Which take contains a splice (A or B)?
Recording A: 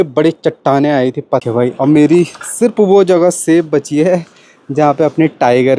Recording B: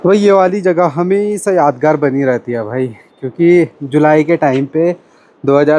A